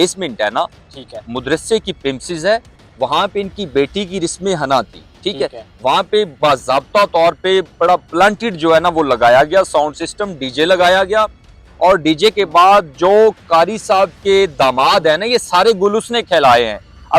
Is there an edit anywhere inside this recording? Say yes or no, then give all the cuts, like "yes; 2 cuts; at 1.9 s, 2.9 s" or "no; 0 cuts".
no; 0 cuts